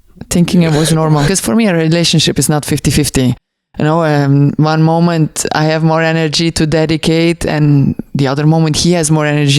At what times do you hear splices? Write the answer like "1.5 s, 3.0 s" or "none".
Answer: 1.3 s